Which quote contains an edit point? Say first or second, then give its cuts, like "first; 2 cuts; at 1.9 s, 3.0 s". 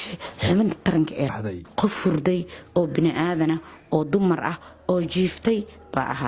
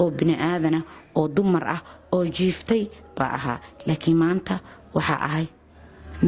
first; 1 cut; at 1.3 s